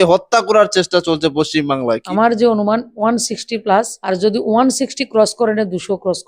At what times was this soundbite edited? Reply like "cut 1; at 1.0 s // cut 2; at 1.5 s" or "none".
cut 1; at 2.0 s // cut 2; at 2.9 s // cut 3; at 4.0 s